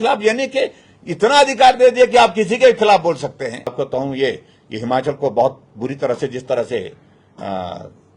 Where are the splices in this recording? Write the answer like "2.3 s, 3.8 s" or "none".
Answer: 3.7 s